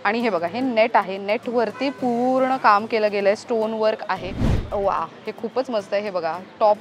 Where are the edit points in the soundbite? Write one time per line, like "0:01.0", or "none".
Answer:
0:04.5

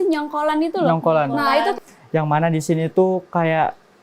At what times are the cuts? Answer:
0:01.9

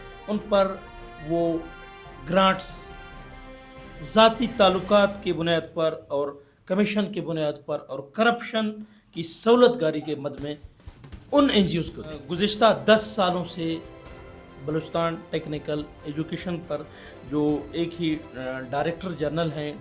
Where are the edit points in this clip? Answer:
0:12.3

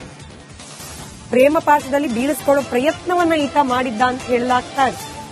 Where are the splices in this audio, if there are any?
0:01.3

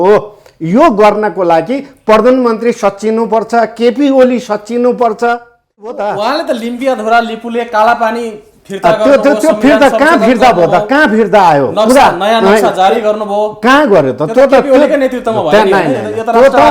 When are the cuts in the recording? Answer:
0:05.9

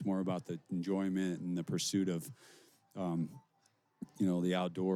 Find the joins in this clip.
none

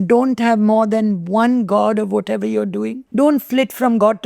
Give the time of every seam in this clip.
0:03.0

